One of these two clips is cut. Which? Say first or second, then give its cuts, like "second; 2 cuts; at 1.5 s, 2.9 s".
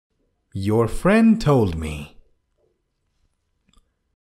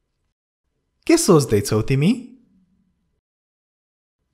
first; 1 cut; at 2.8 s